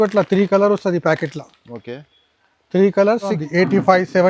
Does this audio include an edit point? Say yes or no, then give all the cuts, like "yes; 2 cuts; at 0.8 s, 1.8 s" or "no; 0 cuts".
yes; 1 cut; at 3.4 s